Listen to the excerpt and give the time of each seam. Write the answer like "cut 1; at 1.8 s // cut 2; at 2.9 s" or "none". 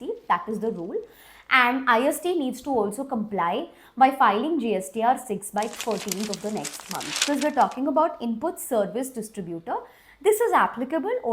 cut 1; at 7.2 s